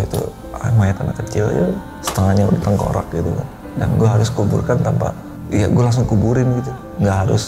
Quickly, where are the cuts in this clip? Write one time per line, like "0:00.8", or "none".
0:01.9
0:05.3